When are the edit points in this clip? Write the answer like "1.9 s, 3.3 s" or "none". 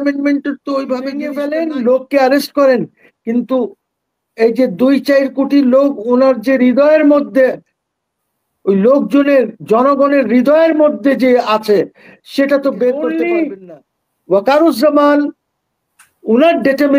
1.4 s, 13.0 s